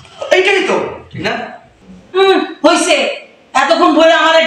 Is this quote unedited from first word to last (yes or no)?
no